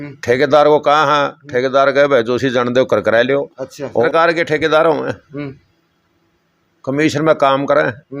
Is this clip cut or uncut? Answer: cut